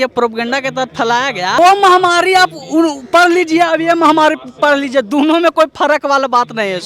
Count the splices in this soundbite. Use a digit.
1